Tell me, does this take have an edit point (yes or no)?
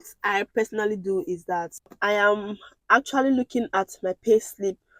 yes